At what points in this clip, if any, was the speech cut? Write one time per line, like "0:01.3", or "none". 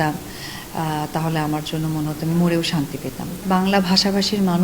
0:03.4

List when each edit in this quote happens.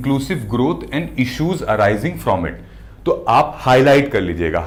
none

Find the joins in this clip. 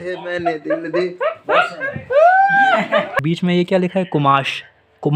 0:03.2

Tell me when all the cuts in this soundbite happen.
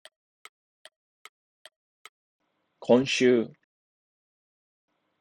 0:02.2

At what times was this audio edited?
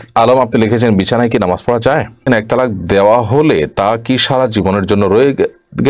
0:02.2

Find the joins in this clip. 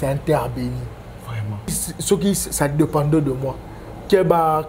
0:01.8

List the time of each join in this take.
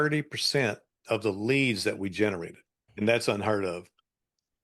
0:02.9

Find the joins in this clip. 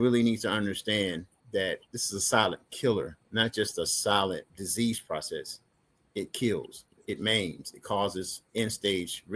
0:01.9
0:03.2
0:04.6

